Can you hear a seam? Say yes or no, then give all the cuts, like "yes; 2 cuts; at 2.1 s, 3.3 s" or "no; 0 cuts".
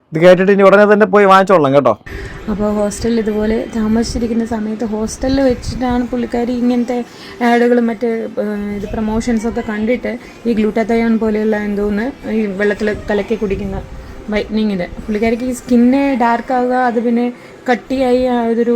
yes; 1 cut; at 2.1 s